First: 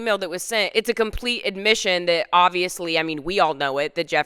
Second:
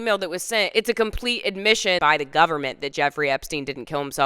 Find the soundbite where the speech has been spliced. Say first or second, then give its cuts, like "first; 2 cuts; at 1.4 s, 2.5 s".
second; 1 cut; at 2.0 s